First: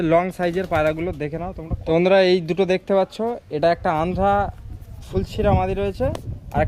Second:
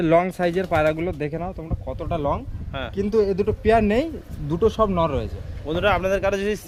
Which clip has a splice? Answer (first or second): first